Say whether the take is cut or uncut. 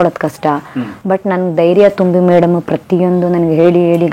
uncut